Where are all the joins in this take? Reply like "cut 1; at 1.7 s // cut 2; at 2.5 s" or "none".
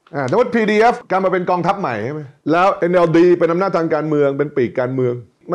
cut 1; at 2.6 s